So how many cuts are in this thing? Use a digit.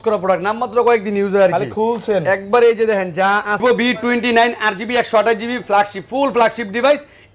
1